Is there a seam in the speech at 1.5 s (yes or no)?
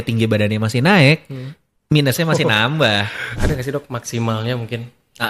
no